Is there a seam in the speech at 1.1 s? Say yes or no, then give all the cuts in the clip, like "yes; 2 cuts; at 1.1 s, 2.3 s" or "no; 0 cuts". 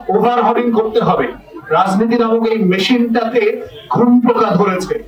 no; 0 cuts